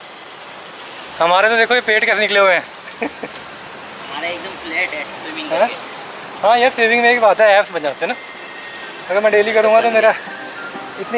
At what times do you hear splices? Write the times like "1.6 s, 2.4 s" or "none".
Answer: none